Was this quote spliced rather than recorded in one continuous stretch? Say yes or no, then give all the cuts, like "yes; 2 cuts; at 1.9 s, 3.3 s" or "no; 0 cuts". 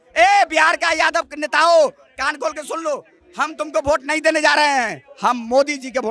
no; 0 cuts